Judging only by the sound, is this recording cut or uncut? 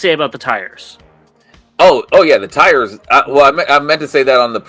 uncut